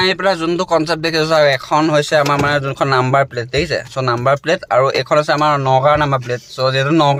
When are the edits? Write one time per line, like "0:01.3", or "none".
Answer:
none